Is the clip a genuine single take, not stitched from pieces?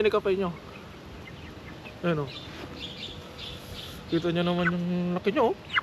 yes; 0 cuts

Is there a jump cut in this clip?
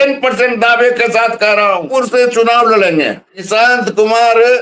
yes; 2 cuts; at 1.9 s, 3.5 s

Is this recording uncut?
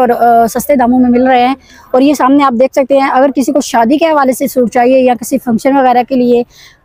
yes; 0 cuts

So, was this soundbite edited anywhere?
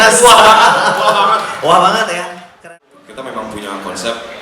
yes; 1 cut; at 2.7 s

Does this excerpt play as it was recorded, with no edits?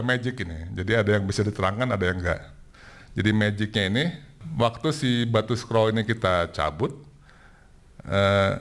no; 1 cut; at 4.4 s

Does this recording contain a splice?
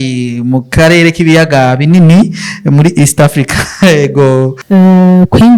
yes; 1 cut; at 4.6 s

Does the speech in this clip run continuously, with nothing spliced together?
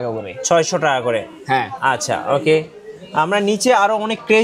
yes; 0 cuts

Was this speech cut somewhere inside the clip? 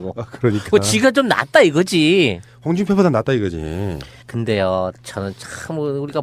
no; 0 cuts

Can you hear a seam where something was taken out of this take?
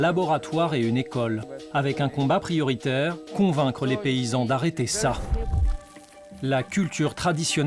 yes; 2 cuts; at 1.5 s, 3.2 s

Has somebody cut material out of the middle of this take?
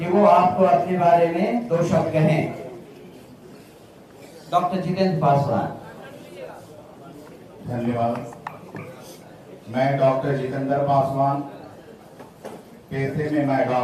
no; 0 cuts

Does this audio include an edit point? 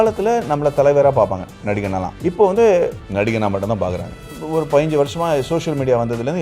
yes; 3 cuts; at 2.1 s, 3.0 s, 4.3 s

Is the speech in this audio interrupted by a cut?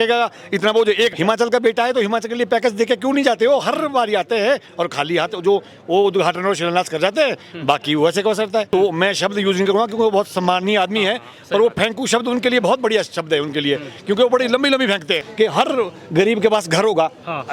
yes; 3 cuts; at 1.1 s, 8.7 s, 15.3 s

